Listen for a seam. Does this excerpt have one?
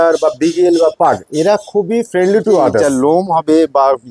yes; 1 cut; at 2.8 s

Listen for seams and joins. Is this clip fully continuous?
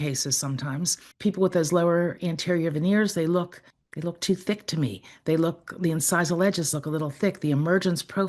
no; 1 cut; at 1.0 s

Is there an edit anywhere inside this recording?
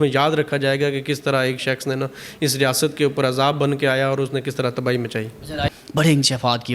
yes; 1 cut; at 5.7 s

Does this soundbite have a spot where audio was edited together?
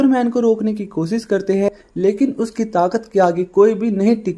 no; 0 cuts

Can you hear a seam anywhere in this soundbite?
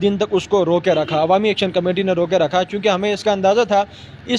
no; 0 cuts

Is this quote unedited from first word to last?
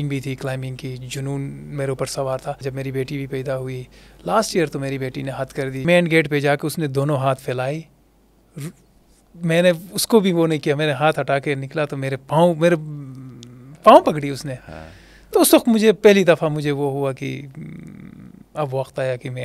no; 2 cuts; at 2.6 s, 5.8 s

